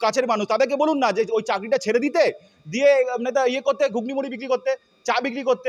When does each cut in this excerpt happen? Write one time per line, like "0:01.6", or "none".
none